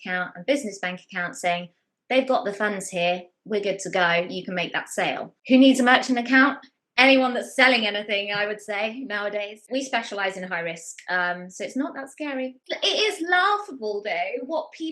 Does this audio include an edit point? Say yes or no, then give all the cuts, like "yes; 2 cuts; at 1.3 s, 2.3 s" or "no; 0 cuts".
yes; 3 cuts; at 5.3 s, 9.6 s, 12.6 s